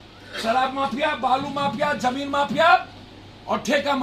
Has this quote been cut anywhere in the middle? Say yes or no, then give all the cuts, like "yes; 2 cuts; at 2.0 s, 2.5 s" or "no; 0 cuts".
no; 0 cuts